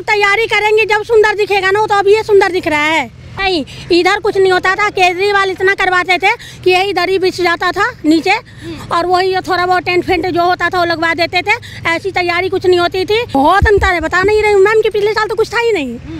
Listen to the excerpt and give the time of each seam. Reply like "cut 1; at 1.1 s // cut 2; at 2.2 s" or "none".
cut 1; at 3.3 s // cut 2; at 13.3 s